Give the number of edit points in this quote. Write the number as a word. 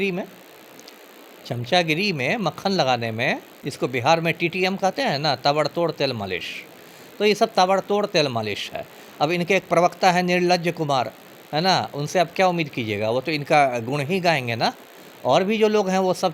zero